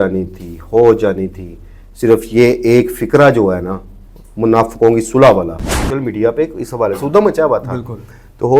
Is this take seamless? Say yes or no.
no